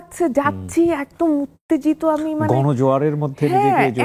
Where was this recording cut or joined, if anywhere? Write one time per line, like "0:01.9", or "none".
none